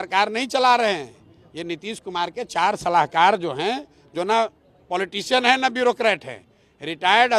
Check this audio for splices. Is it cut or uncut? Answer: uncut